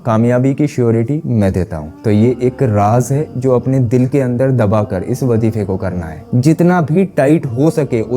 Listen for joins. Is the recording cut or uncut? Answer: cut